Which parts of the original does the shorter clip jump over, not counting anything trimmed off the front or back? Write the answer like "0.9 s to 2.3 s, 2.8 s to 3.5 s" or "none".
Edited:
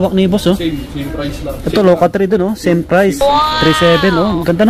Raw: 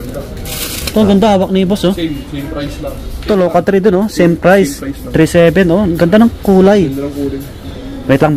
2.9 s to 3.1 s